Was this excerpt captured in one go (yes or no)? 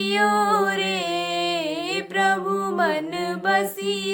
yes